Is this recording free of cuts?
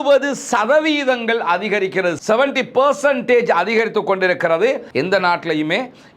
no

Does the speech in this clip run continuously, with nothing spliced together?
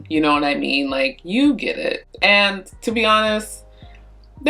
yes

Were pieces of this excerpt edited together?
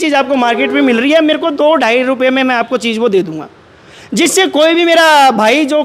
no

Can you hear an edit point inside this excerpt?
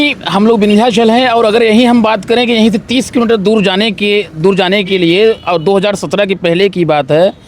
no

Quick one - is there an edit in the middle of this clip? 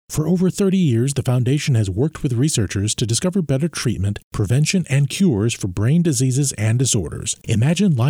no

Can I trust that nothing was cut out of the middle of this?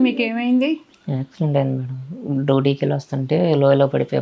no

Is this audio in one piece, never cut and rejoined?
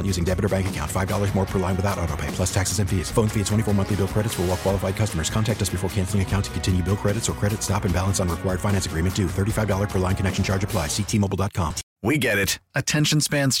no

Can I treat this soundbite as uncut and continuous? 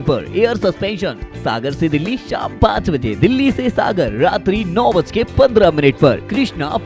yes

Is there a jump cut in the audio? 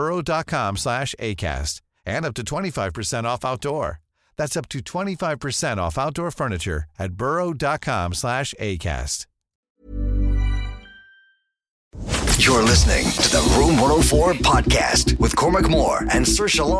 yes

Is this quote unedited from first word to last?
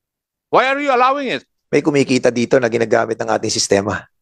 no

